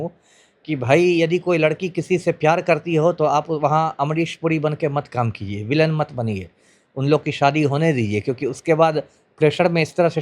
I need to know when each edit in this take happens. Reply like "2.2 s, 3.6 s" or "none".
none